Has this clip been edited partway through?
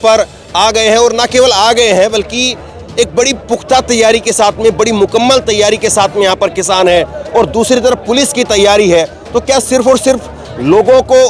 no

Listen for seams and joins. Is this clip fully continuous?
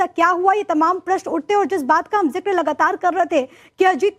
no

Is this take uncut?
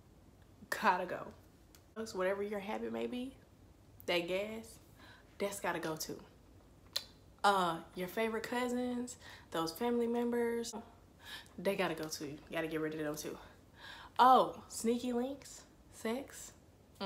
no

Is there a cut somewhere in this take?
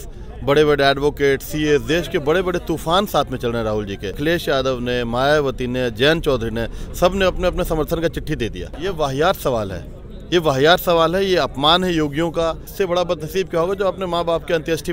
yes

